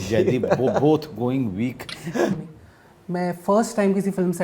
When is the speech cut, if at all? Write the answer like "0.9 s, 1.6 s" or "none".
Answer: 2.4 s